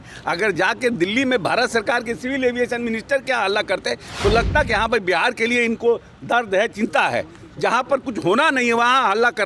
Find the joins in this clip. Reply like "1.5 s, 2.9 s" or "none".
none